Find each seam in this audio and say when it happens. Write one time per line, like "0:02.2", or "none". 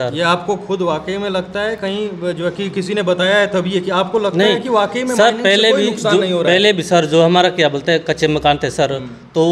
none